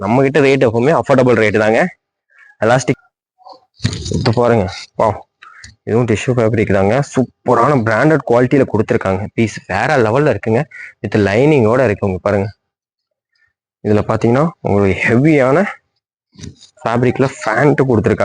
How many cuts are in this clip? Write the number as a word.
one